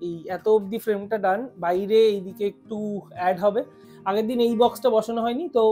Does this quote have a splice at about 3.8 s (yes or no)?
yes